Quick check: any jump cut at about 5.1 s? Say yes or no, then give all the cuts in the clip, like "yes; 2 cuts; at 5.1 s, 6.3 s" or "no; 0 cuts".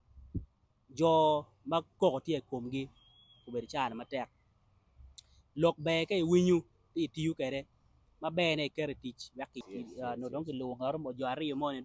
no; 1 cut; at 9.6 s